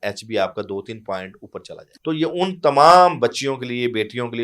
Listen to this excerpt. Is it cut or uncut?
cut